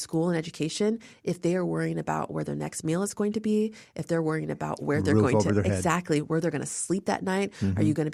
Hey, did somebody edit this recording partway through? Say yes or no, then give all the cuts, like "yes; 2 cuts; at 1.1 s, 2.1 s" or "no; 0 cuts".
no; 0 cuts